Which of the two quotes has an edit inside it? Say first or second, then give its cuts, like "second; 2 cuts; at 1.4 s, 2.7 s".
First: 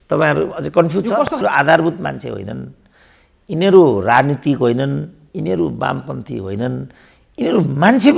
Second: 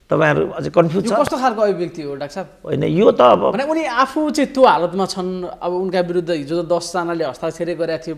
first; 1 cut; at 1.4 s